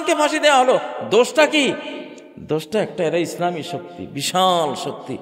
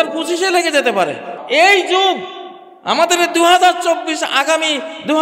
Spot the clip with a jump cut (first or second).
second